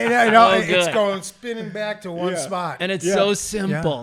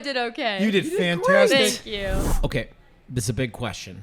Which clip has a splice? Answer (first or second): second